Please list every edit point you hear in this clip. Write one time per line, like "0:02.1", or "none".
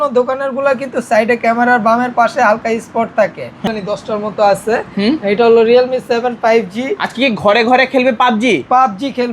0:03.7